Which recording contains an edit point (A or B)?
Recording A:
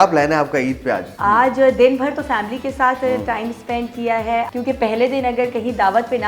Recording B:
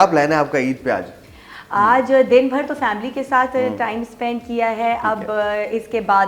A